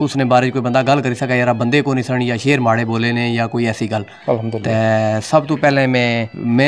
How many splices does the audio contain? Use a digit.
0